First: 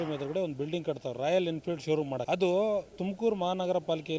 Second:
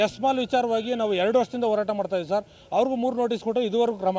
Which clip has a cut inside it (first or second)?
first